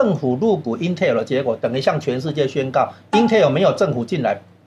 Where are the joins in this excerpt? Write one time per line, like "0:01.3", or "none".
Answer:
none